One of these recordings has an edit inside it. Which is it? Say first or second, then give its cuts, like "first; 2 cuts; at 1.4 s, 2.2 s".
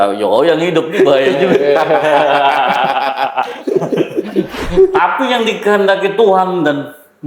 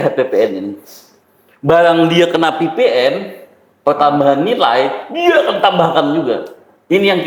first; 1 cut; at 4.9 s